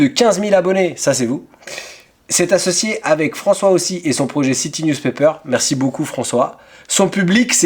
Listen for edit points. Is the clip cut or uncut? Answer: uncut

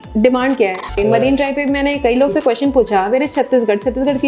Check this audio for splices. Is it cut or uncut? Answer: cut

